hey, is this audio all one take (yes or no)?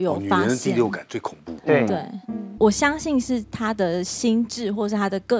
no